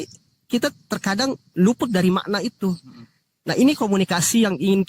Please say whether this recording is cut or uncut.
uncut